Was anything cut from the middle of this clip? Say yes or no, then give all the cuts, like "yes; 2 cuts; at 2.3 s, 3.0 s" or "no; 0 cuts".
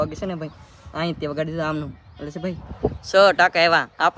no; 0 cuts